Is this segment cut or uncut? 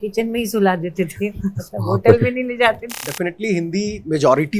cut